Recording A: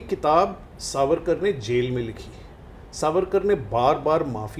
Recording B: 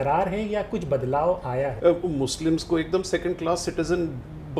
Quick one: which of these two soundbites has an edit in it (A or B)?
B